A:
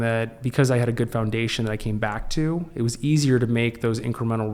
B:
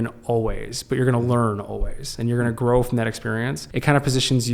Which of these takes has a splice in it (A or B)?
B